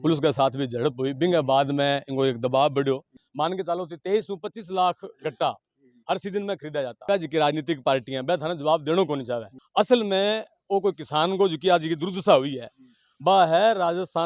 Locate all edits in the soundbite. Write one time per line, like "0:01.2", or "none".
0:03.2
0:07.0